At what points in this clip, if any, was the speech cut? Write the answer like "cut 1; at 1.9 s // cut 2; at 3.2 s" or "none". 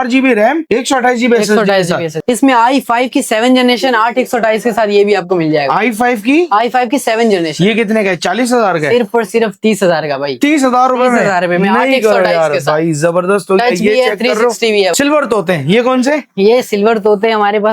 cut 1; at 2.1 s // cut 2; at 14.9 s

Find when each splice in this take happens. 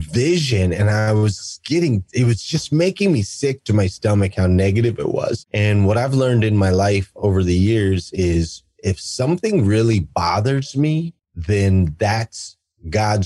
cut 1; at 5.5 s

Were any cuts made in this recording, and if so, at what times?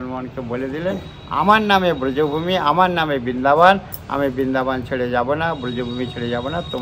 none

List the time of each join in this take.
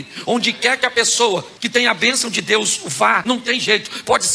cut 1; at 3.2 s

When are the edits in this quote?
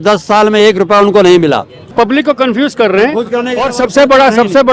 cut 1; at 1.9 s

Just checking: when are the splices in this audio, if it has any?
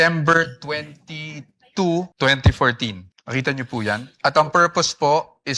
cut 1; at 2.1 s // cut 2; at 3.1 s // cut 3; at 4.1 s

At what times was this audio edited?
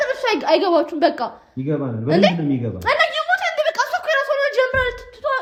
none

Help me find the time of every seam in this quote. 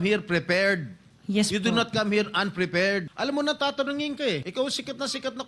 cut 1; at 3.1 s // cut 2; at 4.5 s

